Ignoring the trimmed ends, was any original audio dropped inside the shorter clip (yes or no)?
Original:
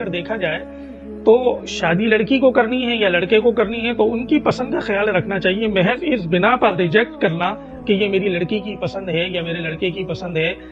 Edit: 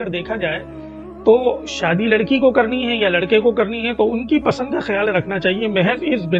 no